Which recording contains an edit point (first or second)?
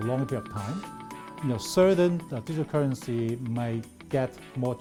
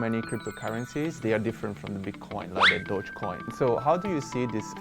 second